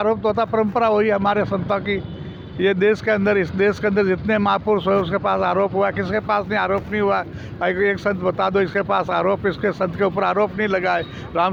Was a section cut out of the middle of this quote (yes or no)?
no